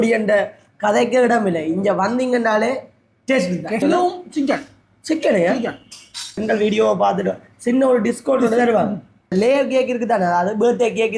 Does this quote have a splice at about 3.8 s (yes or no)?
yes